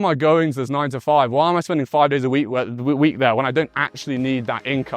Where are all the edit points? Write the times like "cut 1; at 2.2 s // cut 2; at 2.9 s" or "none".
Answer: none